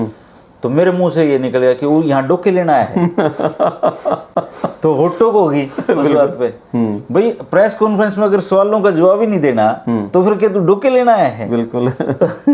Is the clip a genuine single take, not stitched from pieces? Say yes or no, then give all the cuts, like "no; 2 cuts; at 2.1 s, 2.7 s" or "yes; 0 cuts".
yes; 0 cuts